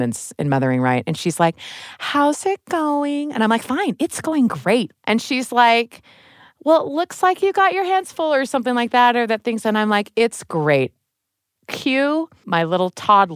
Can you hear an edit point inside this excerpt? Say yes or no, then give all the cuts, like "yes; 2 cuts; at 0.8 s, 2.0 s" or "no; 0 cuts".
yes; 2 cuts; at 4.9 s, 12.4 s